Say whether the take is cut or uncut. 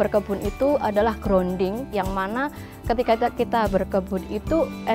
cut